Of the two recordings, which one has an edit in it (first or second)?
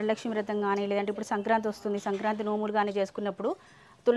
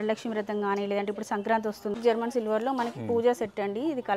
second